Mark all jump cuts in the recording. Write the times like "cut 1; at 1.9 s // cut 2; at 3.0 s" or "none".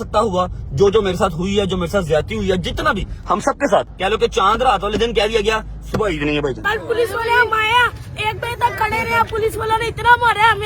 cut 1; at 3.9 s // cut 2; at 6.6 s